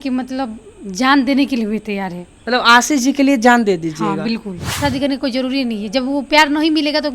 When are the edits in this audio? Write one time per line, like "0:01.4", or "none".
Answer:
0:04.8